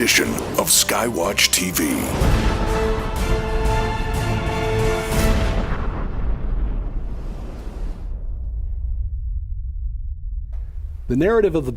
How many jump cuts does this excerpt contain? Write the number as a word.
one